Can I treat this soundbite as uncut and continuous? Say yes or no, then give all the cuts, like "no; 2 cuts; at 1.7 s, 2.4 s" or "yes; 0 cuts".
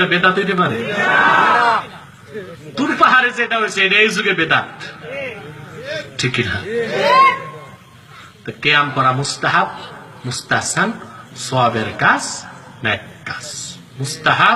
yes; 0 cuts